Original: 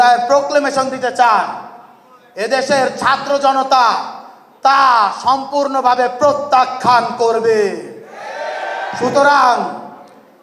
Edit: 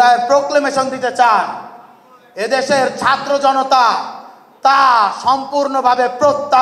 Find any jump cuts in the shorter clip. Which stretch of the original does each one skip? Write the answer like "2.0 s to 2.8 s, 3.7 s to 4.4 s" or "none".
none